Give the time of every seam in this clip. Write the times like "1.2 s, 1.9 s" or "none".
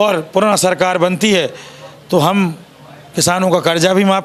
none